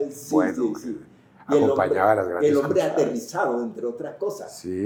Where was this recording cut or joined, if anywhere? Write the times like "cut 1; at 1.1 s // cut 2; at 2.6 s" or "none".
none